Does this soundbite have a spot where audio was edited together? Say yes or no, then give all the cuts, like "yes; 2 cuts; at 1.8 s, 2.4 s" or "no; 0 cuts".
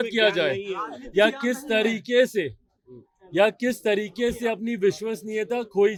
no; 0 cuts